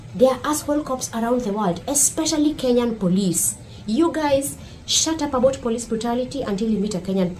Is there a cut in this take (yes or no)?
no